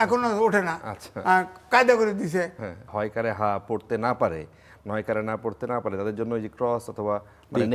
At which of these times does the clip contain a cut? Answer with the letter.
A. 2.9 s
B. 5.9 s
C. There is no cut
A